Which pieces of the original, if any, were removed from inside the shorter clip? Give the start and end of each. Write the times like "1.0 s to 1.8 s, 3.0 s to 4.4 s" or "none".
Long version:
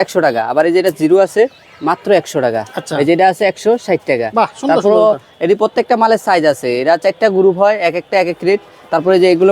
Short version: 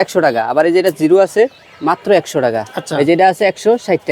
none

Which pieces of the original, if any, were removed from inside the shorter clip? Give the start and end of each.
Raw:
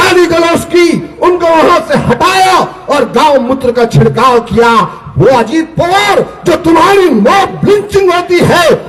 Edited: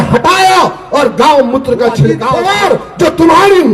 4.2 s to 5.7 s

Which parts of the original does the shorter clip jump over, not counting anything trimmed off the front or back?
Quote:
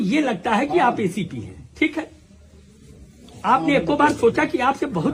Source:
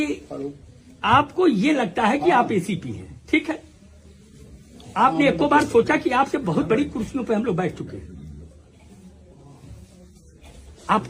none

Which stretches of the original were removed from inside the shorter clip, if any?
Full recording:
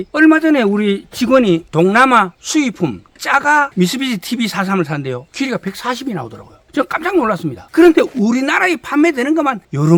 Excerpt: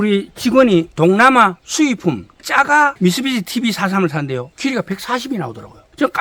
none

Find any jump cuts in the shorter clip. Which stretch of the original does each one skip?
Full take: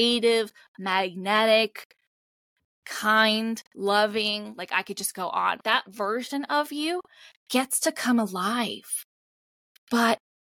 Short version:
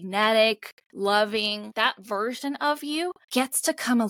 2.0 s to 3.7 s, 4.5 s to 5.6 s, 7.1 s to 7.4 s

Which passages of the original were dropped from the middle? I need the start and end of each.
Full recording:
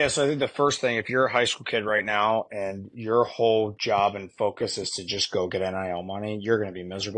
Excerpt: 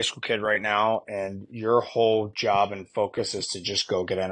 none

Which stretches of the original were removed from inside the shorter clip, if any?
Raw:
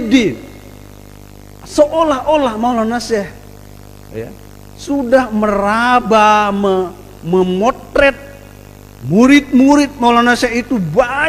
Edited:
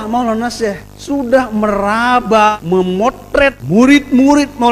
3.4 s to 4.7 s, 6.3 s to 7.1 s, 8.2 s to 9.0 s

